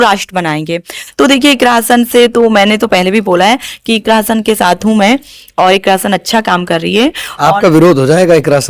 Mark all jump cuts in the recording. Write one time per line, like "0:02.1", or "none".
0:01.0

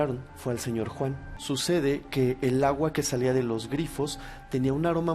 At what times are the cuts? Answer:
0:01.3

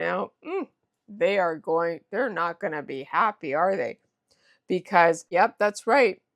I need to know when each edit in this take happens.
0:05.2

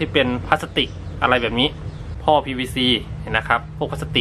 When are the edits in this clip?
0:02.1

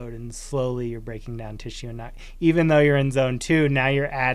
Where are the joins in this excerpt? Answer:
none

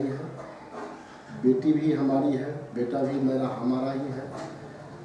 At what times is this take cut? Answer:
none

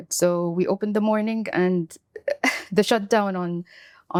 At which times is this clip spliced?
none

